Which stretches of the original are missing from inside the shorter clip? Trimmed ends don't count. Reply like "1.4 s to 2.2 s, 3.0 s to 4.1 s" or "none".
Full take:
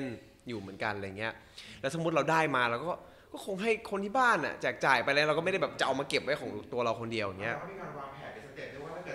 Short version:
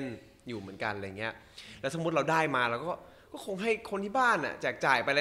none